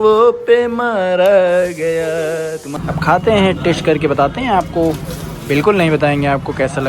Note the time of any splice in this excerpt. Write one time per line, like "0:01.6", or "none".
0:02.7